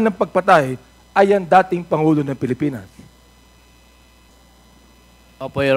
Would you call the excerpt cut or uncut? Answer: cut